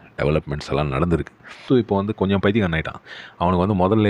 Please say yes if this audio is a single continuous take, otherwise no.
no